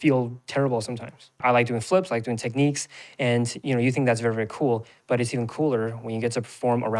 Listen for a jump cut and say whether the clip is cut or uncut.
cut